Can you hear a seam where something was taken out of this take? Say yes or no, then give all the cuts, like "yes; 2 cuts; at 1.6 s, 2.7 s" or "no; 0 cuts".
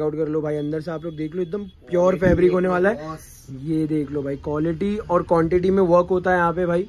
no; 0 cuts